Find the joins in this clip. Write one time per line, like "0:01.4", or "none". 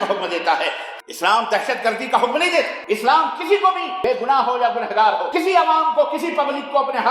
0:00.9
0:02.8
0:03.9
0:05.3